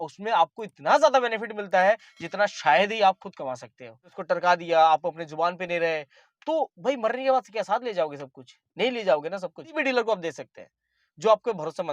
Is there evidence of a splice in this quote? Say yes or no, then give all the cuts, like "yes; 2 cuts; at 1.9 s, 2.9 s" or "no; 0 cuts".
yes; 2 cuts; at 4.1 s, 9.7 s